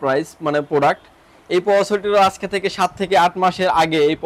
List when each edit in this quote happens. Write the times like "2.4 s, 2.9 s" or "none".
none